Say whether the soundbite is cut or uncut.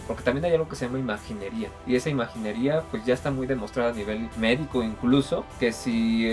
cut